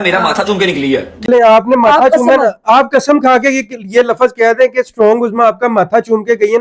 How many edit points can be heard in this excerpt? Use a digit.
1